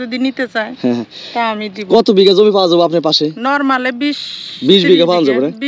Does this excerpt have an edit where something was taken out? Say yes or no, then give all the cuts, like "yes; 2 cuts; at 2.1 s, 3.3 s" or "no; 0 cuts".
no; 0 cuts